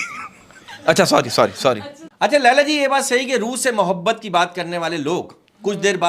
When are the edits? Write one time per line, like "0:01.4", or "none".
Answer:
0:01.8